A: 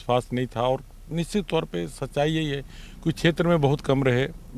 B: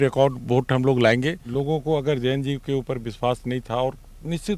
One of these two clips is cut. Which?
B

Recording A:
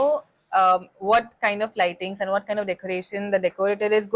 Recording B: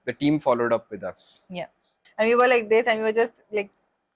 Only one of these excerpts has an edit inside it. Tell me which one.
B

